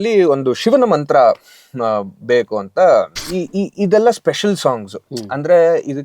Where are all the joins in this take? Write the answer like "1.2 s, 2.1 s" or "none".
3.2 s

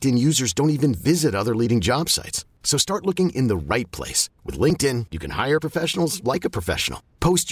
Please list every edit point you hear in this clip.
none

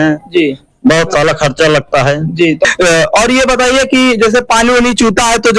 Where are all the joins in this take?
2.7 s

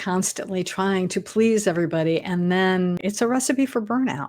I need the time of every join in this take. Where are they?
3.0 s

